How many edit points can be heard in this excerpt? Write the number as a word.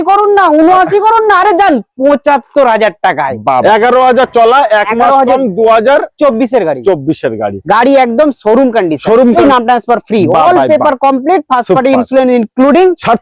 two